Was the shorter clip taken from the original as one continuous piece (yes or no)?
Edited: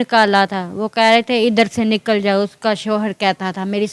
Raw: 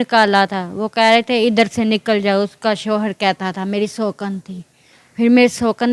yes